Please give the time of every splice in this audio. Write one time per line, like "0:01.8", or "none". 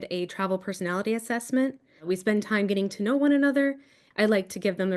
0:01.9
0:04.0